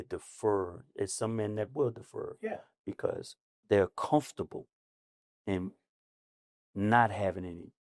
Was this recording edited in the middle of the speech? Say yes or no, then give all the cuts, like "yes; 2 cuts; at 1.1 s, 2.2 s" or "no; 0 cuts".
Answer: no; 0 cuts